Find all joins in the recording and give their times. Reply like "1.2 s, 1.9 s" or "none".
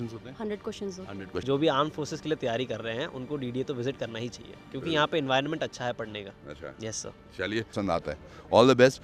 1.4 s, 7.7 s